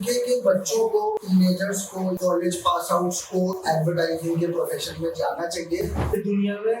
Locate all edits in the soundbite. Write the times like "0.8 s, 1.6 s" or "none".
1.2 s, 2.2 s, 6.0 s